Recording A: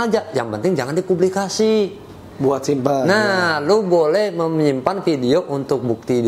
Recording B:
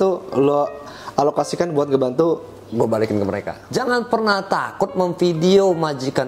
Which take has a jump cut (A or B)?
B